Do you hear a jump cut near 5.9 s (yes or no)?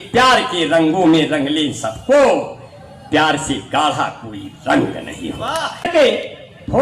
yes